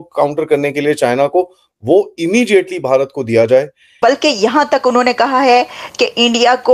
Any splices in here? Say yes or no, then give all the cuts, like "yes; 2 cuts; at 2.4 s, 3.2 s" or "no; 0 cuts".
yes; 1 cut; at 3.9 s